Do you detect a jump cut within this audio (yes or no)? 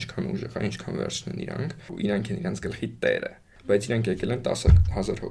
yes